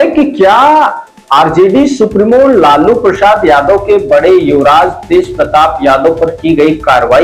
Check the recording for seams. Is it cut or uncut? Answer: uncut